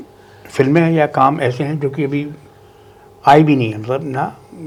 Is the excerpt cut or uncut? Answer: uncut